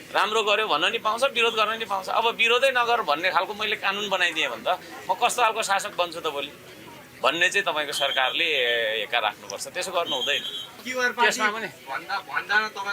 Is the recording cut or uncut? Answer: cut